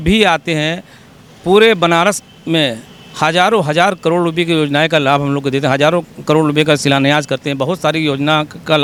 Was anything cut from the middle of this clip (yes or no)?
no